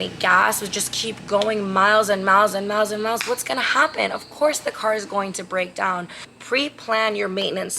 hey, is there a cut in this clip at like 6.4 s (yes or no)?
yes